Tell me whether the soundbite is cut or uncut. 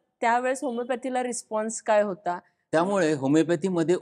cut